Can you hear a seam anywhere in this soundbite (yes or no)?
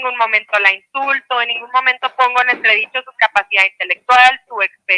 no